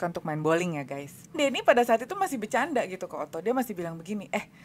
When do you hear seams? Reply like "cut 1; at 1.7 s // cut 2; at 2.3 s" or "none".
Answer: cut 1; at 1.3 s